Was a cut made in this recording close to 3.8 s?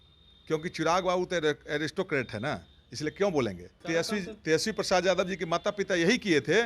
yes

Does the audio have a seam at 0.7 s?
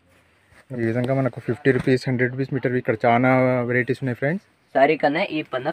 yes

